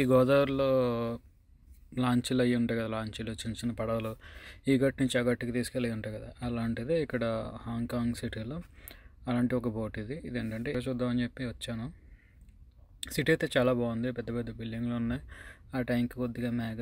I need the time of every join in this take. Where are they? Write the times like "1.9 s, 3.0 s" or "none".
10.7 s